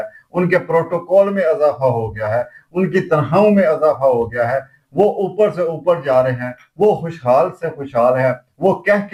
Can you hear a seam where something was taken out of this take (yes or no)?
no